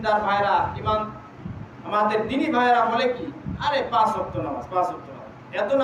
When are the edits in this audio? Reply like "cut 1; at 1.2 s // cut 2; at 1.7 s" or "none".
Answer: none